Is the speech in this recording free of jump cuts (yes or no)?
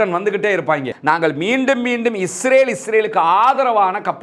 no